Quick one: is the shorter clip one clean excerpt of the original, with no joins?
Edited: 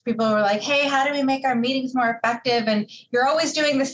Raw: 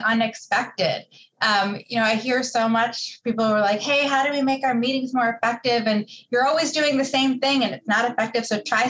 yes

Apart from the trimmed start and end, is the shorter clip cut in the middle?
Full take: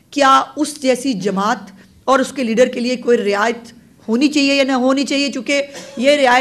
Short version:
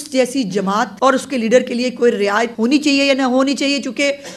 yes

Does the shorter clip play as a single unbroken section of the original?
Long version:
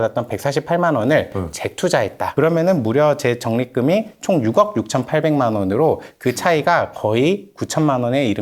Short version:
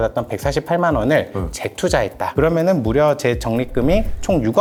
yes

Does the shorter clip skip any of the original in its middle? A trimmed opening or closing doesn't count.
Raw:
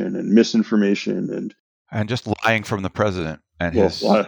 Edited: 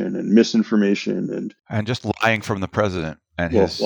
yes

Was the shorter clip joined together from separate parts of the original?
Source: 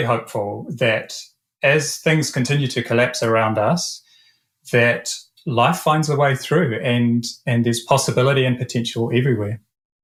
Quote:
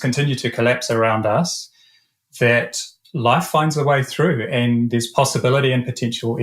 yes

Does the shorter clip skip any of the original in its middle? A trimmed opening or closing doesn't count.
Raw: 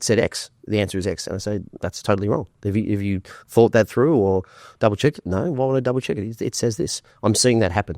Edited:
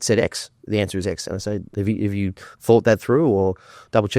yes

